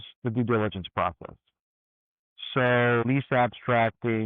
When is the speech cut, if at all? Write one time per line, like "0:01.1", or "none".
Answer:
0:03.0